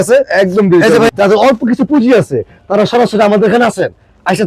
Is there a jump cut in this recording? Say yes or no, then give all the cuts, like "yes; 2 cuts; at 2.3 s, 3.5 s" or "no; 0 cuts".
yes; 1 cut; at 1.1 s